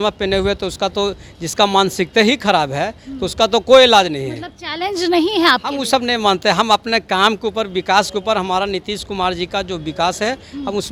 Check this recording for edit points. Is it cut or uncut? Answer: uncut